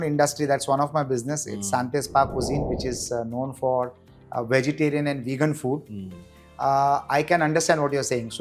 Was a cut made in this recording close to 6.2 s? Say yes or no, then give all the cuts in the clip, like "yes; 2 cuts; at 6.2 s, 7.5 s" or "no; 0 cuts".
no; 0 cuts